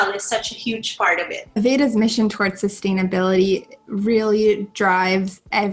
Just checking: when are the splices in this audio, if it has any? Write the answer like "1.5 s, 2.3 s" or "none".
1.4 s